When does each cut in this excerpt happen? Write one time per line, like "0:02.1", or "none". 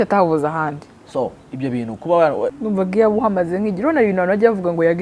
0:02.5